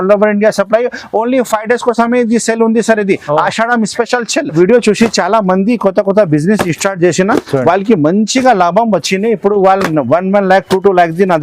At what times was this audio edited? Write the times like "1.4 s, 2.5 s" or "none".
4.5 s